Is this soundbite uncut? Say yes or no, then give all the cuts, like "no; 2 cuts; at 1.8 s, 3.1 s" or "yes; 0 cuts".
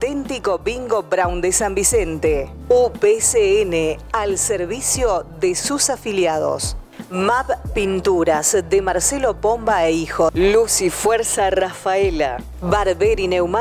yes; 0 cuts